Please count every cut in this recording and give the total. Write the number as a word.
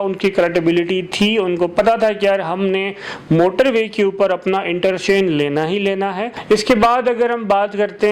one